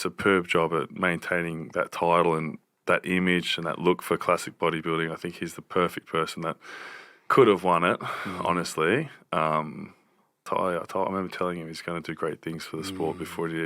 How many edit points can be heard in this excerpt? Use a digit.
1